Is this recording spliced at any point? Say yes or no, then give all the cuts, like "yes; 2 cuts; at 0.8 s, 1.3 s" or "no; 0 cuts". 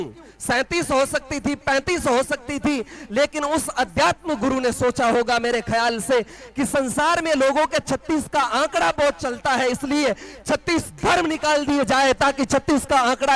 no; 0 cuts